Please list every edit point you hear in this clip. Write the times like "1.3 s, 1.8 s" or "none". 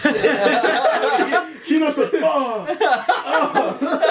none